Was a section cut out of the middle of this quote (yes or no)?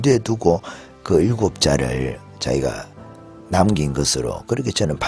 no